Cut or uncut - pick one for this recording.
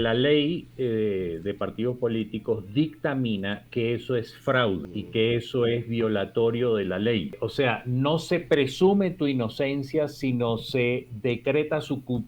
cut